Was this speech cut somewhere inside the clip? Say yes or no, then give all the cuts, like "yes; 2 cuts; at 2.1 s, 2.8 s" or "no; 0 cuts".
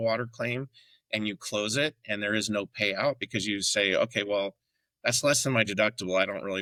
no; 0 cuts